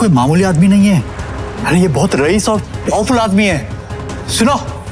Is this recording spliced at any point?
no; 0 cuts

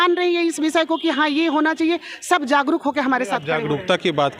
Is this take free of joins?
yes; 0 cuts

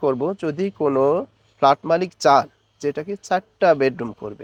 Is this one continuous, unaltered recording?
yes; 0 cuts

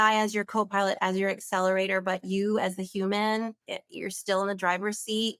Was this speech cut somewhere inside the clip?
no; 0 cuts

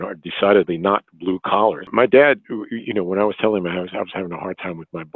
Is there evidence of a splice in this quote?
yes; 1 cut; at 1.9 s

